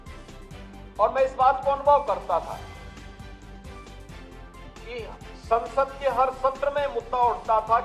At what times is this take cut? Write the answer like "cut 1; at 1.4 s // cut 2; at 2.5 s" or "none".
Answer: cut 1; at 3.1 s // cut 2; at 4.8 s